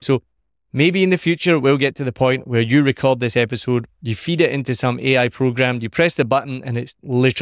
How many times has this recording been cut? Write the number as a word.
zero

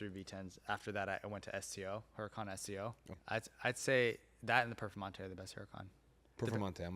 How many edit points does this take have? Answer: one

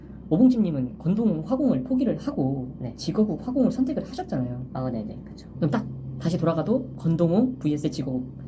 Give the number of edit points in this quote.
one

